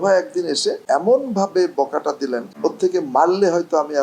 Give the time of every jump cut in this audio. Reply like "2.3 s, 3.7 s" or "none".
0.8 s, 2.4 s